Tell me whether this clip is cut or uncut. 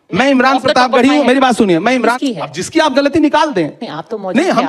cut